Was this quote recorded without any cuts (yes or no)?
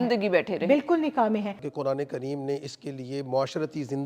yes